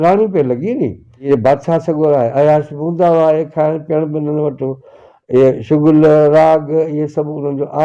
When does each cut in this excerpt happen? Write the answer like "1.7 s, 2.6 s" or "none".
1.3 s